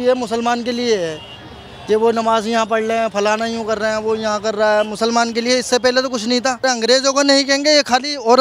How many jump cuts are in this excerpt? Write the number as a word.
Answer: one